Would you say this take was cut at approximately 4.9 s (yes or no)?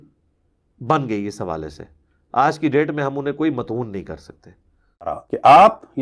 yes